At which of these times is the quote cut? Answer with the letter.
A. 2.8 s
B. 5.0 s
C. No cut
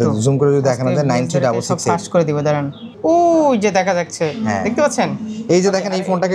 A